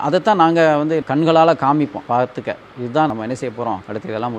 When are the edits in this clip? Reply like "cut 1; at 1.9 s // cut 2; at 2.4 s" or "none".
cut 1; at 1.1 s // cut 2; at 2.0 s // cut 3; at 3.4 s